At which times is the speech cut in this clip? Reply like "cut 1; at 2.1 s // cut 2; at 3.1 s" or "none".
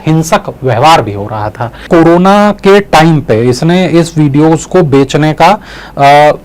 cut 1; at 1.8 s